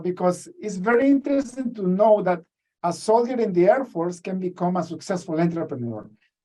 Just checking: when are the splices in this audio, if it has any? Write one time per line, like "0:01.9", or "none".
none